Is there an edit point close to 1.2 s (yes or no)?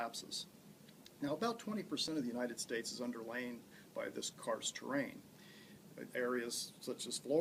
no